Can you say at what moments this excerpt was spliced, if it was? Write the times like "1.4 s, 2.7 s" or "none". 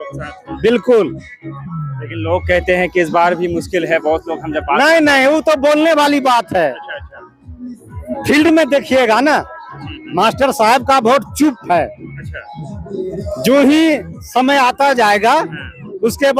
none